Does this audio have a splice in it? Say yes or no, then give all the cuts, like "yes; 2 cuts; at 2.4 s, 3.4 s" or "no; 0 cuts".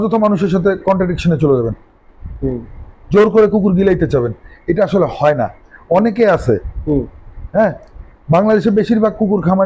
no; 0 cuts